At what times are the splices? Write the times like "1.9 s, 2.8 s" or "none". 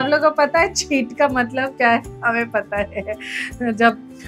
none